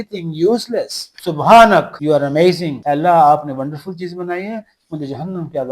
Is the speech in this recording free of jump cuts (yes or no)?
yes